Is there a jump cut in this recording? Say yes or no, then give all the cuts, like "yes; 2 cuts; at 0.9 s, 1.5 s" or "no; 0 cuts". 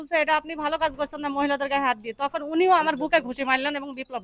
no; 0 cuts